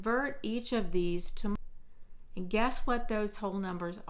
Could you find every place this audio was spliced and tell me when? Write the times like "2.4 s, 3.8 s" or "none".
1.6 s